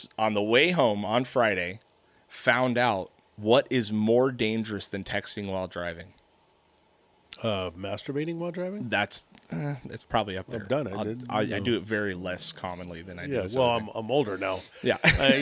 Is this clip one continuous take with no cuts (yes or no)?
yes